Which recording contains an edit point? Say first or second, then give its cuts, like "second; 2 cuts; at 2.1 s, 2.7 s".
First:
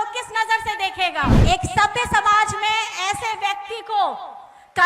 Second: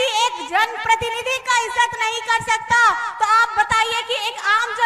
first; 1 cut; at 1.4 s